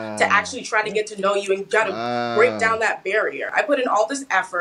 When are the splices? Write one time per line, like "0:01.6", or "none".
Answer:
0:03.5